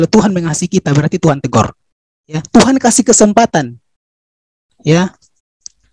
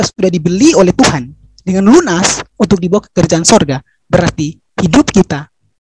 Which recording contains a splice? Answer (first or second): first